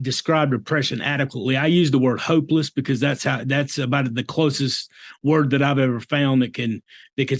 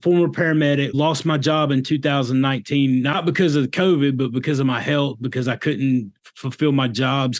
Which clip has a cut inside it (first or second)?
second